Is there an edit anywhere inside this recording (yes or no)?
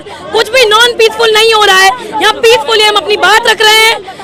no